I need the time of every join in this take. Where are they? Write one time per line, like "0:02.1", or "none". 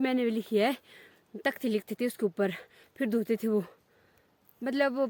none